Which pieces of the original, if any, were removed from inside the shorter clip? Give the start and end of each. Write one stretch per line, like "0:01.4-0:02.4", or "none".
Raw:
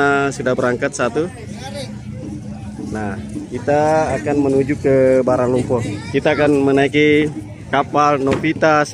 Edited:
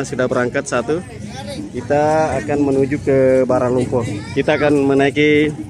0:01.8-0:03.3